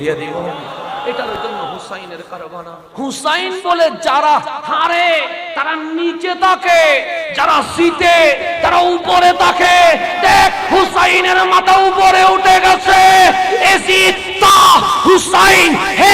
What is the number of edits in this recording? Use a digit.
1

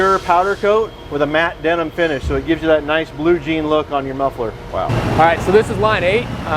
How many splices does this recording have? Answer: 1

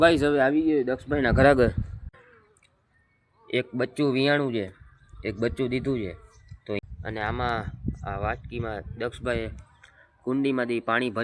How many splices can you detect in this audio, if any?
2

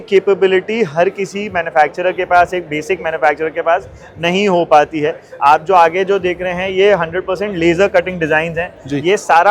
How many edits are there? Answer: 0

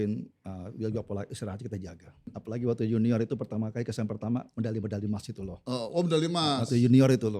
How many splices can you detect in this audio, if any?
1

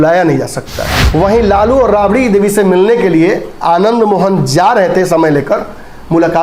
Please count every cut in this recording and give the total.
1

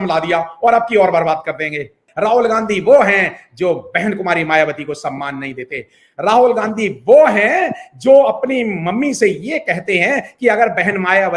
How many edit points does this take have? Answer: 1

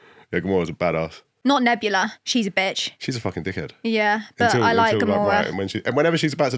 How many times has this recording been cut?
1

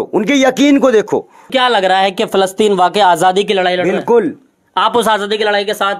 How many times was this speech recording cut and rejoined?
1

